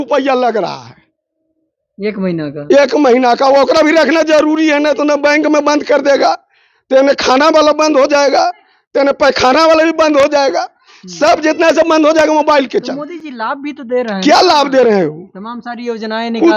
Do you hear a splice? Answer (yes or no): no